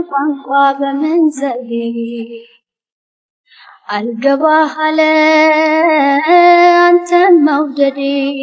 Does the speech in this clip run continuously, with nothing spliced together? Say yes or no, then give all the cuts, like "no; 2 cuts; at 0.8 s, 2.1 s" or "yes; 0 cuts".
yes; 0 cuts